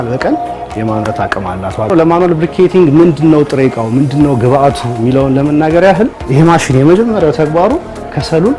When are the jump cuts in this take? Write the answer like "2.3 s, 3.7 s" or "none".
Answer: 1.9 s, 6.2 s